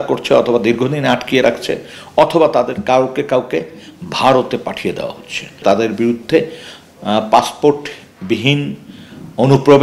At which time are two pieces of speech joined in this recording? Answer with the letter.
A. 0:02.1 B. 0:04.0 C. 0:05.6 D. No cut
C